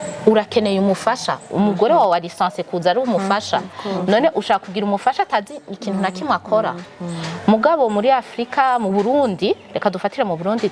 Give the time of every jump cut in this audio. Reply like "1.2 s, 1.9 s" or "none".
none